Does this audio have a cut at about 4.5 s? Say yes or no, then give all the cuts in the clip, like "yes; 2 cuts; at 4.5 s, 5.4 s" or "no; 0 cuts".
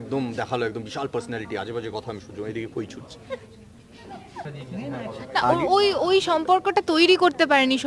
yes; 1 cut; at 4.5 s